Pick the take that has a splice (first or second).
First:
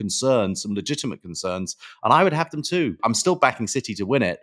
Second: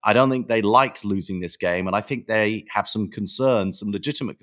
first